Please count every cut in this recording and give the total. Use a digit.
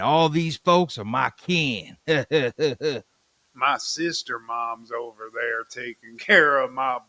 0